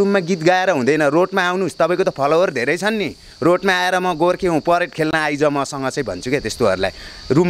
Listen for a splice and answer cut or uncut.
uncut